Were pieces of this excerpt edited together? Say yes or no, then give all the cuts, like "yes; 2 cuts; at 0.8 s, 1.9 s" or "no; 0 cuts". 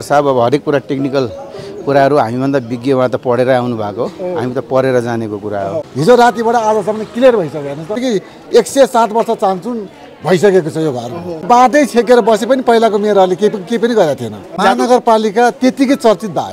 yes; 4 cuts; at 5.9 s, 8.0 s, 11.4 s, 14.5 s